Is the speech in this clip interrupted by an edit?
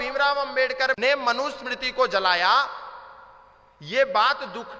yes; 1 cut; at 1.0 s

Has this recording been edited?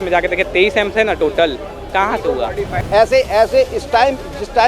yes; 1 cut; at 2.8 s

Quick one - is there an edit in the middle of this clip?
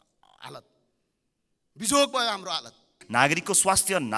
yes; 1 cut; at 2.9 s

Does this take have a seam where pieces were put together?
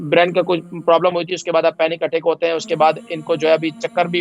no; 0 cuts

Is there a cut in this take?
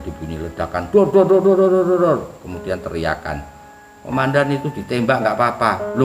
no; 0 cuts

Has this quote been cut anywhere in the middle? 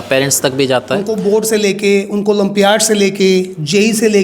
yes; 1 cut; at 1.0 s

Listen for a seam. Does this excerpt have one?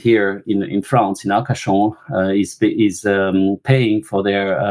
no; 0 cuts

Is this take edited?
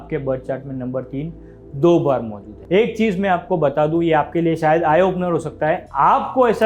yes; 1 cut; at 2.5 s

